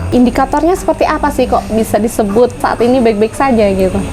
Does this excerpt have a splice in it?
yes; 1 cut; at 2.6 s

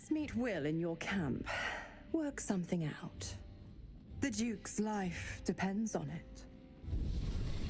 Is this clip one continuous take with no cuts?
no; 1 cut; at 6.7 s

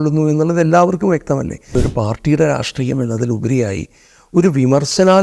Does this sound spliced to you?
yes; 1 cut; at 1.7 s

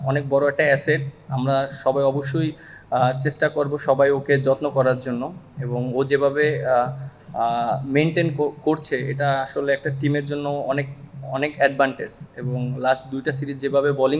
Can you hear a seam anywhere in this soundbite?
no; 0 cuts

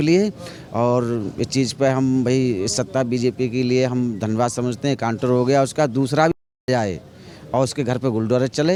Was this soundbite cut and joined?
no; 0 cuts

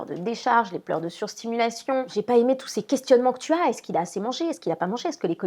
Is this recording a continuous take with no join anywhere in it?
no; 1 cut; at 2.1 s

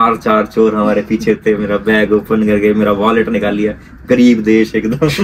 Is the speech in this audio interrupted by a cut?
no; 0 cuts

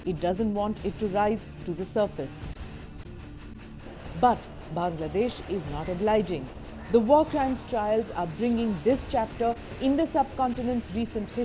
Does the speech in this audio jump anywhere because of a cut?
yes; 1 cut; at 4.3 s

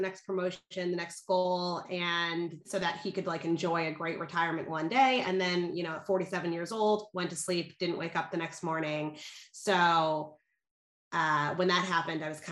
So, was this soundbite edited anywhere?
no; 0 cuts

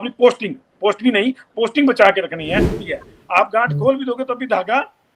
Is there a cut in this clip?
yes; 1 cut; at 2.8 s

